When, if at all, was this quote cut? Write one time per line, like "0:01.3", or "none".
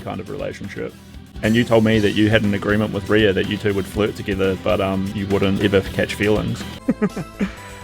0:01.2
0:05.6
0:06.7